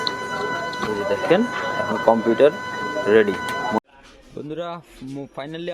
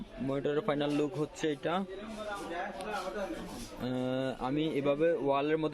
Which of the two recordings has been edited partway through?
first; 1 cut; at 3.8 s

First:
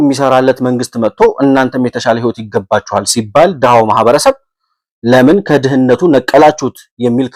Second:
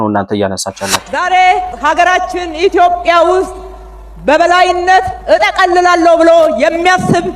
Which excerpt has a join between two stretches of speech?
second; 1 cut; at 1.0 s

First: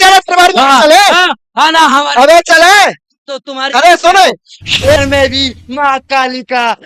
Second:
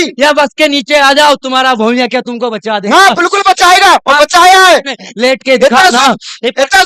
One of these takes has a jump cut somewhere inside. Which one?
first; 1 cut; at 5.0 s

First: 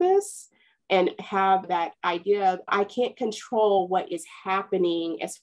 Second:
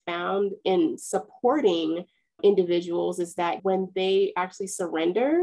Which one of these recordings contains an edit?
second; 1 cut; at 3.6 s

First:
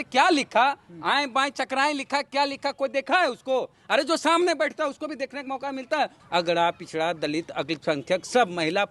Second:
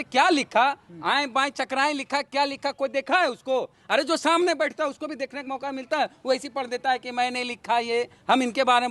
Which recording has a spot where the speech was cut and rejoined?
first; 1 cut; at 6.2 s

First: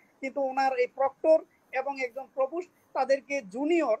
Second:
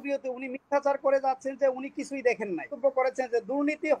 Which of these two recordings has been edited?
second; 1 cut; at 2.7 s

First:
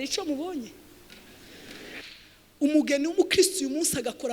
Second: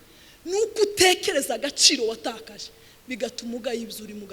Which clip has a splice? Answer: first; 1 cut; at 2.0 s

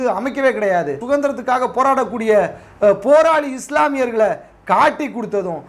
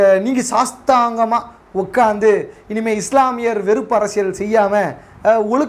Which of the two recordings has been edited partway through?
first; 1 cut; at 1.0 s

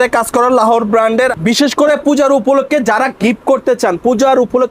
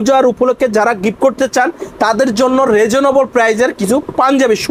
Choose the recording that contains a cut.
first; 1 cut; at 1.3 s

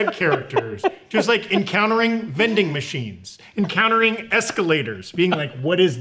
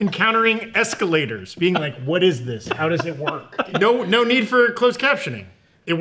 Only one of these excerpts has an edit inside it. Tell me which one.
second; 1 cut; at 3.7 s

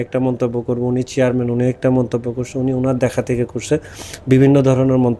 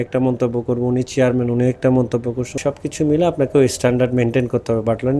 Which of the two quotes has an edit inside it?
second; 1 cut; at 2.6 s

